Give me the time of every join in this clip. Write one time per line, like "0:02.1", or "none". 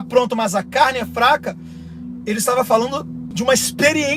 0:03.2